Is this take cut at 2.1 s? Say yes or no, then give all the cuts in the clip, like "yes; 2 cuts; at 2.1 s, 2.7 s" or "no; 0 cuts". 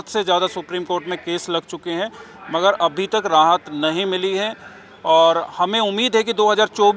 no; 0 cuts